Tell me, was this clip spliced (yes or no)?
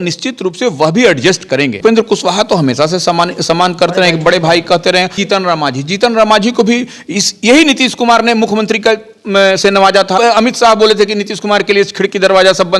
yes